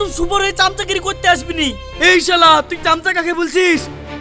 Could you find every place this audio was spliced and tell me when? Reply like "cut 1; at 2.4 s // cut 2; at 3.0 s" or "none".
cut 1; at 1.9 s